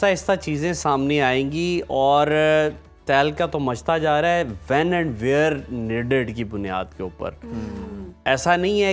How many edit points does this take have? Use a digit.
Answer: 0